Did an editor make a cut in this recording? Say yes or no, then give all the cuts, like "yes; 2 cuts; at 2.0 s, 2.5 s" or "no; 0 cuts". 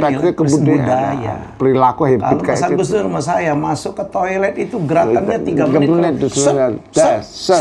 no; 0 cuts